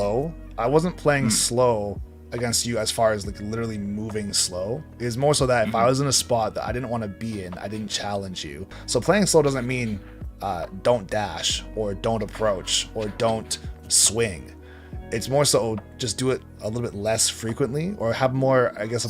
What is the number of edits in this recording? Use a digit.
1